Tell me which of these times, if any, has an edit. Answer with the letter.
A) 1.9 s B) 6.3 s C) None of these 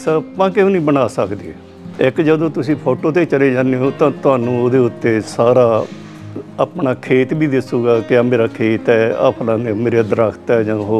A